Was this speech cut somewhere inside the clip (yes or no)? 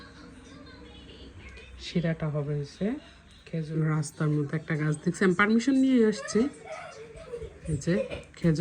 yes